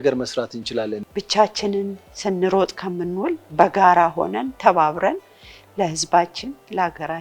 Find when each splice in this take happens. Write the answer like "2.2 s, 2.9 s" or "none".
1.0 s